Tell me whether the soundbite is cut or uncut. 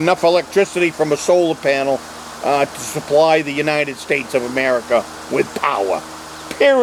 uncut